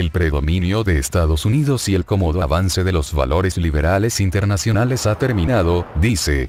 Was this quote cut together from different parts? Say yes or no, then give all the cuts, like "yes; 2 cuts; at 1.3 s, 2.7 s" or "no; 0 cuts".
no; 0 cuts